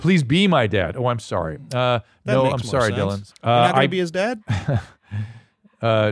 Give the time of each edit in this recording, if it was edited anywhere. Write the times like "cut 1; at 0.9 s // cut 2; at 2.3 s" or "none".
cut 1; at 3.2 s // cut 2; at 4.5 s